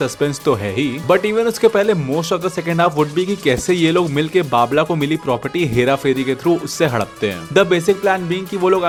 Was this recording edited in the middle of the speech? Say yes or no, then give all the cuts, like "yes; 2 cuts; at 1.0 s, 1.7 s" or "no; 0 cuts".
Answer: no; 0 cuts